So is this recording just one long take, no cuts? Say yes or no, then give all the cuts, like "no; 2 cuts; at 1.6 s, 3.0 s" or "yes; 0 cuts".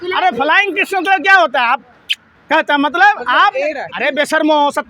no; 1 cut; at 3.9 s